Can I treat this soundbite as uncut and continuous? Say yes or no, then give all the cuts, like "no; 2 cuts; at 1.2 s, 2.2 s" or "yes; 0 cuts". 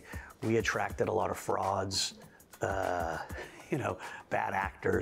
yes; 0 cuts